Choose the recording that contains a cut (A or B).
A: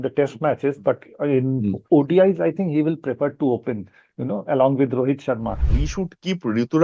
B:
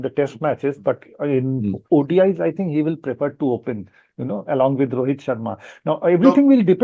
A